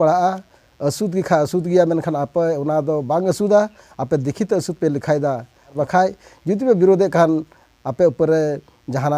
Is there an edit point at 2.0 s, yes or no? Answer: no